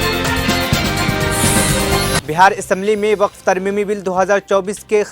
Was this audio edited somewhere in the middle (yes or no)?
yes